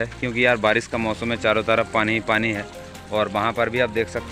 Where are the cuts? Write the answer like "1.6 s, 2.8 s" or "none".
none